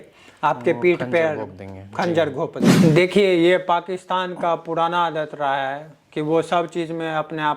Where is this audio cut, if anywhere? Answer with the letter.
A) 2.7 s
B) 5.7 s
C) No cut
A